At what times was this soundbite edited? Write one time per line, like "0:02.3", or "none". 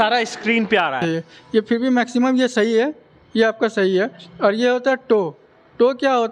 0:01.0